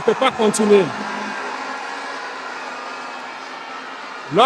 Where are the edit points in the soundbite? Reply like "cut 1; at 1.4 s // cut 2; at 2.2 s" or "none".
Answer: none